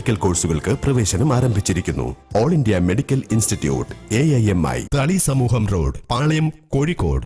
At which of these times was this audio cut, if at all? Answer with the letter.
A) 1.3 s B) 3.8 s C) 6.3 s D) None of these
D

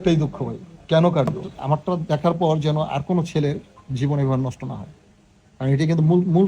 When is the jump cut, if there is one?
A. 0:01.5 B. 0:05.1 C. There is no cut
A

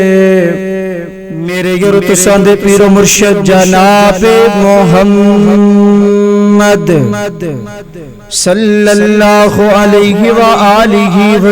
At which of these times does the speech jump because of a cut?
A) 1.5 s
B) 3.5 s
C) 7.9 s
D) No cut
A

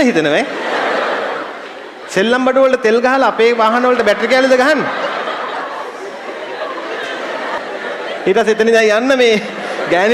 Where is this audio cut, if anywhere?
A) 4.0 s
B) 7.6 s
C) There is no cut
B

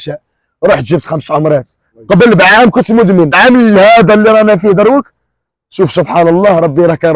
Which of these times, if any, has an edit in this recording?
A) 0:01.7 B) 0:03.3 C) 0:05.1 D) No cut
B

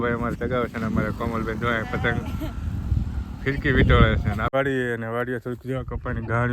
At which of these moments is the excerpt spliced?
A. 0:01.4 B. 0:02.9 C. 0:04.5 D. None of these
C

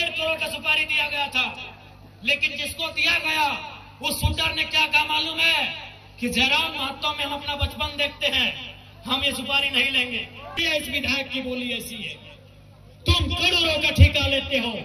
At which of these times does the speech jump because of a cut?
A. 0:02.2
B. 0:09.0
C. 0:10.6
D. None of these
C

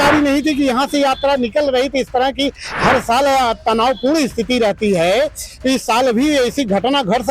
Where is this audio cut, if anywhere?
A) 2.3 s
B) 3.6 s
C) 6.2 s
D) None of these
D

